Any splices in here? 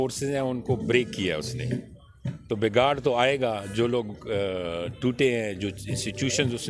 no; 0 cuts

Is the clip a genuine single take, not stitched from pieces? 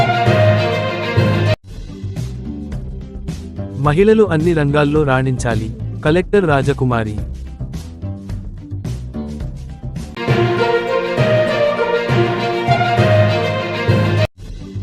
no; 1 cut; at 1.6 s

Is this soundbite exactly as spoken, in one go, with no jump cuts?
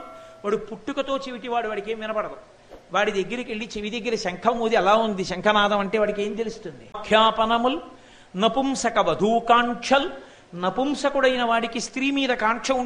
no; 1 cut; at 7.0 s

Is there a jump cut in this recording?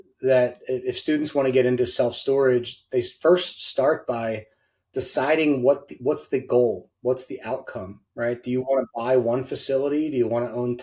no; 0 cuts

